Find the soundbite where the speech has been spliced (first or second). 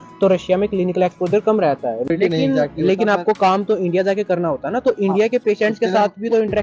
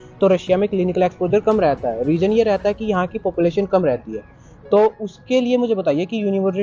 first